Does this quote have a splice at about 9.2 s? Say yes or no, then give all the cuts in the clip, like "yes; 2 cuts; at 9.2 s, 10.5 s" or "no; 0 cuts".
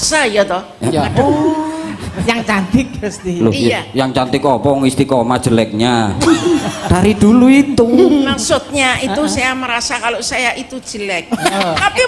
no; 0 cuts